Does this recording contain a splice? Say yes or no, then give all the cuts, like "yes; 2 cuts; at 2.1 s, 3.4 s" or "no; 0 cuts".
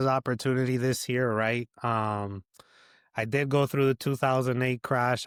no; 0 cuts